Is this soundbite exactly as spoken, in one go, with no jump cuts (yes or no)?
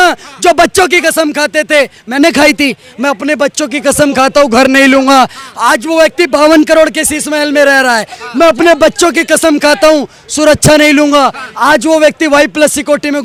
yes